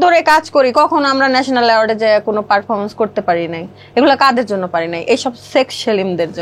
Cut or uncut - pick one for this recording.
uncut